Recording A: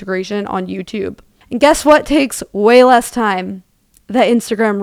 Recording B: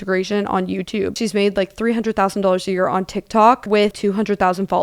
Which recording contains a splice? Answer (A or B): B